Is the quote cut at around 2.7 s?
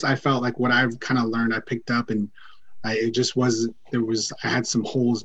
no; 0 cuts

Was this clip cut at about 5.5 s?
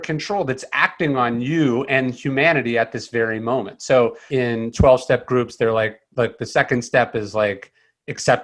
no; 1 cut; at 4.2 s

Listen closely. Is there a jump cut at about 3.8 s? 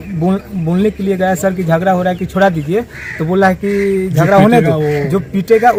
no; 0 cuts

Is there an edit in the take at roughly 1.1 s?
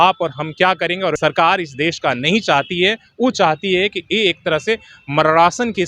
yes; 1 cut; at 1.1 s

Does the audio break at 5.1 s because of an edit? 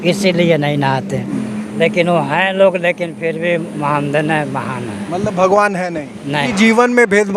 no; 2 cuts; at 1.3 s, 6.5 s

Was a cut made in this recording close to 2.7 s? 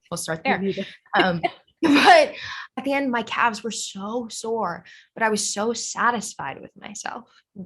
yes; 1 cut; at 2.7 s

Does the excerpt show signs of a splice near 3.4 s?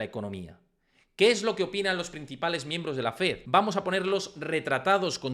yes; 1 cut; at 3.4 s

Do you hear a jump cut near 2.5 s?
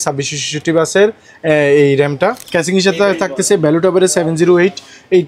yes; 1 cut; at 2.5 s

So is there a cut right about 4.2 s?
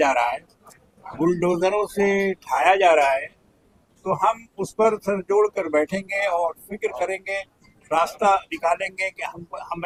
no; 0 cuts

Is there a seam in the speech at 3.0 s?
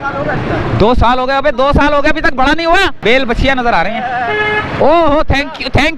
yes; 1 cut; at 3.0 s

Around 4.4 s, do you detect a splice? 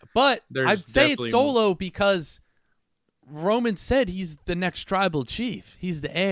no; 0 cuts

